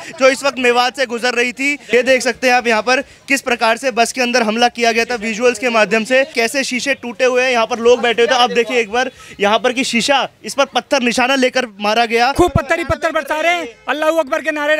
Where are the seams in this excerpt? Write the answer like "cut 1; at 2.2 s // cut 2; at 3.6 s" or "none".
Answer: cut 1; at 1.8 s // cut 2; at 6.3 s // cut 3; at 12.3 s